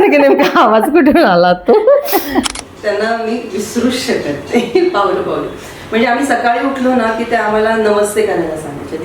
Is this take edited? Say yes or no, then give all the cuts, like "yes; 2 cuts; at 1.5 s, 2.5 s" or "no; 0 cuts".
yes; 1 cut; at 2.6 s